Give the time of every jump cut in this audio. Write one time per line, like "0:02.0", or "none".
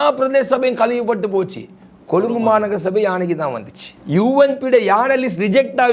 none